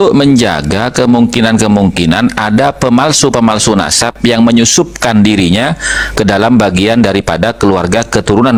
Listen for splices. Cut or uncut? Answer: uncut